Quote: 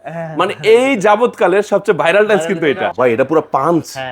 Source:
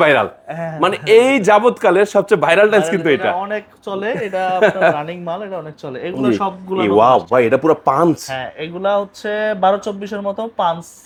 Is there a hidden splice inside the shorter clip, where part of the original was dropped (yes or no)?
yes